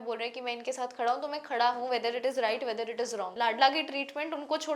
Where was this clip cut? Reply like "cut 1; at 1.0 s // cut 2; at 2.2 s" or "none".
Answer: cut 1; at 3.3 s